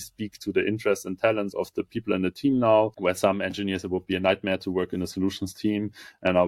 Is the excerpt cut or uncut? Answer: cut